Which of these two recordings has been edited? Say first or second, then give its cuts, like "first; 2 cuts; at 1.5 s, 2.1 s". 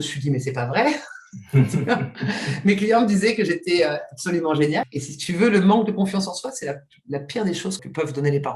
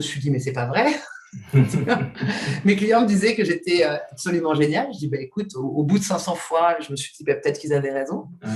first; 2 cuts; at 4.9 s, 7.8 s